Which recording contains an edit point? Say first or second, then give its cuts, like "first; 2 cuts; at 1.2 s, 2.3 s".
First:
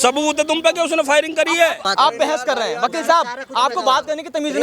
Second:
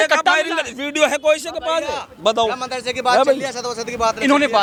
first; 1 cut; at 1.8 s